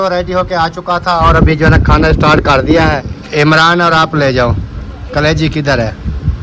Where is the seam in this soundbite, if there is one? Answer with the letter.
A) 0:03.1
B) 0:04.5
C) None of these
A